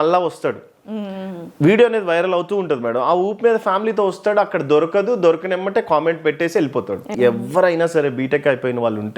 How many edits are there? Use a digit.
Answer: 1